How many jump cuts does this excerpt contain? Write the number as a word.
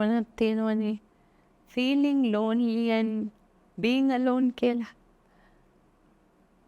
zero